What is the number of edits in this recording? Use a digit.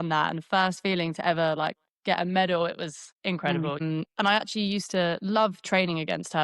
1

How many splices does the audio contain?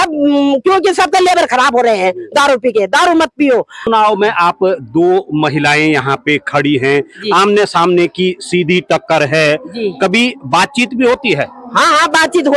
1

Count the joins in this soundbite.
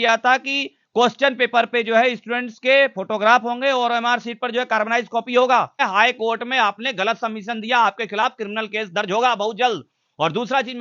1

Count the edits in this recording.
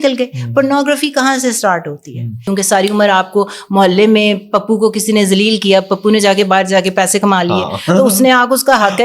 1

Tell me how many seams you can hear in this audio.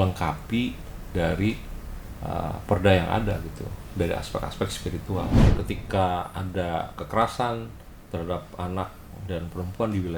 1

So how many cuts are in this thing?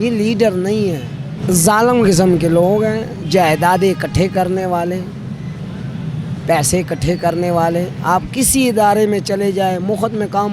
1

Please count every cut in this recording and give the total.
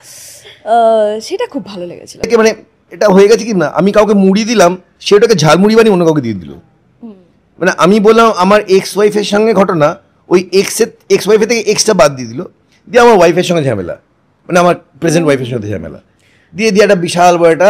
1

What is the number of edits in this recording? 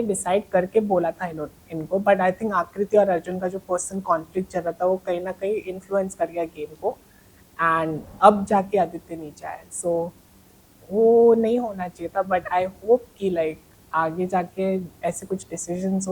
0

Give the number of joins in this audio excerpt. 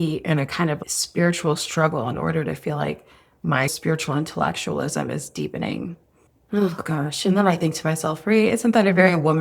1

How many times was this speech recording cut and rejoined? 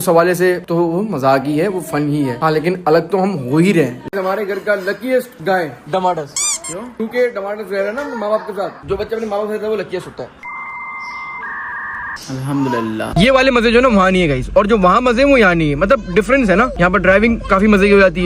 2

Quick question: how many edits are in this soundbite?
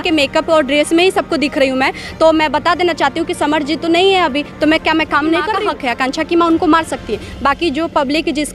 1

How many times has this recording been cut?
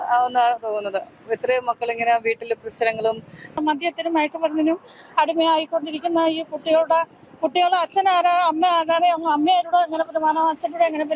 1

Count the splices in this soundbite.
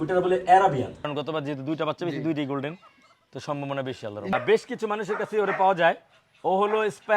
2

